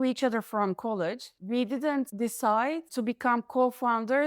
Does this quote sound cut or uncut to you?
cut